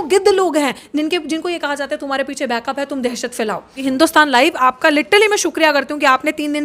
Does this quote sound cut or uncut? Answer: cut